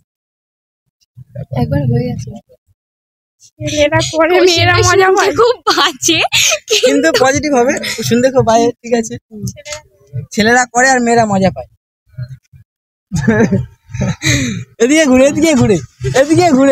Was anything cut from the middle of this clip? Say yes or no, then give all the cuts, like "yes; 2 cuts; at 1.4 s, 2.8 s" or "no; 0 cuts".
yes; 1 cut; at 7.2 s